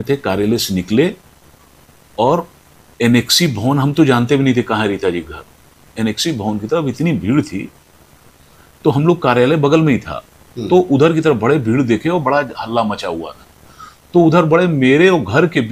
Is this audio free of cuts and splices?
yes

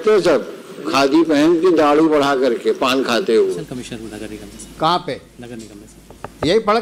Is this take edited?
yes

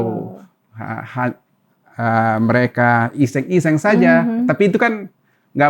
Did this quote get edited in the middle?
no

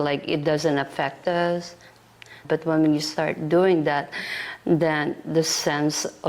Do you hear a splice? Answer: yes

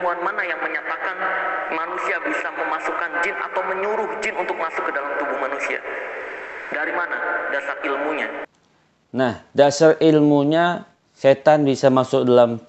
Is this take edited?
no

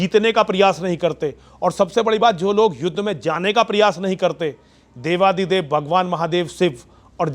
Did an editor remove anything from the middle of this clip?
no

